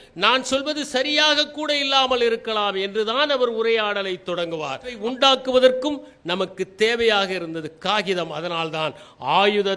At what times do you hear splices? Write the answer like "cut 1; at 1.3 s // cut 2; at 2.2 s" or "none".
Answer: cut 1; at 4.9 s